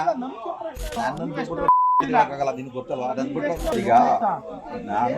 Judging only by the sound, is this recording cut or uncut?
cut